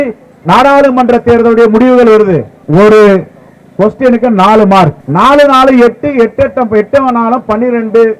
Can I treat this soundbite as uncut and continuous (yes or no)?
no